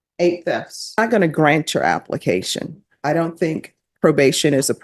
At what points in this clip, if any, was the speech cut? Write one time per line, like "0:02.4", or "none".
0:01.0